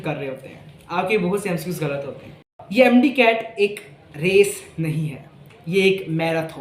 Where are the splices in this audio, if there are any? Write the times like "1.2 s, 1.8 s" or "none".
2.6 s